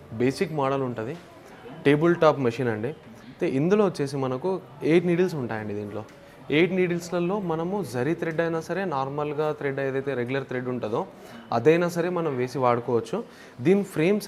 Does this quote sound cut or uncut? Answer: uncut